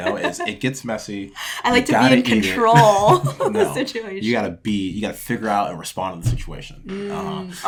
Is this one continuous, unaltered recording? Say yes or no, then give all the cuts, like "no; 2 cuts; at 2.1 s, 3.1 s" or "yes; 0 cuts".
yes; 0 cuts